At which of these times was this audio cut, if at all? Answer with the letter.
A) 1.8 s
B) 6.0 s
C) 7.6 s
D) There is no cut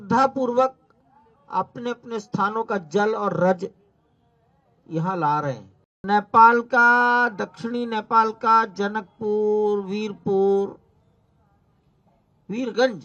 B